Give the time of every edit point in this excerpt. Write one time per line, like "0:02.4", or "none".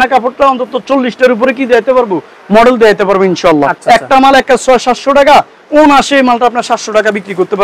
0:03.8